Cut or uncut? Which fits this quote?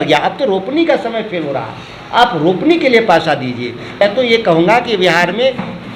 cut